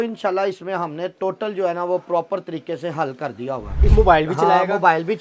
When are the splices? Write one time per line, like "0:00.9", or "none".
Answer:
0:03.6